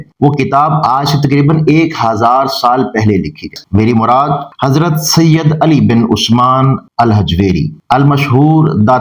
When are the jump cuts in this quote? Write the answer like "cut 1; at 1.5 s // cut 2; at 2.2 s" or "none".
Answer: cut 1; at 3.5 s